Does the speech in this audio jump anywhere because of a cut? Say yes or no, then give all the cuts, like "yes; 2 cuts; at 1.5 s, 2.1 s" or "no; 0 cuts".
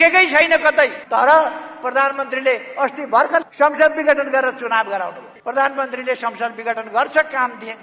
yes; 3 cuts; at 1.0 s, 3.5 s, 5.3 s